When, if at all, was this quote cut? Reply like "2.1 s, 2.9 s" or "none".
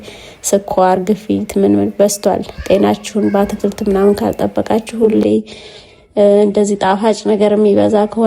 none